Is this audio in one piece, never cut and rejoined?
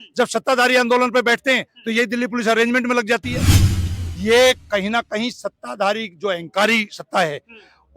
no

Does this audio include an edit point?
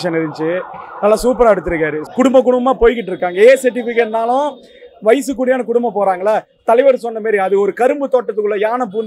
yes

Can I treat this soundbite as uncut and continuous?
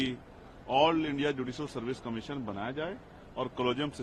yes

